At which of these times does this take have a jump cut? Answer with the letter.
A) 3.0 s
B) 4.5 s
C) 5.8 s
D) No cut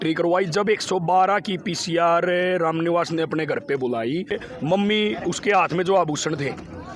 B